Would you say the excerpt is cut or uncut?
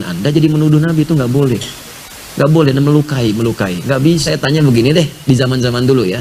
cut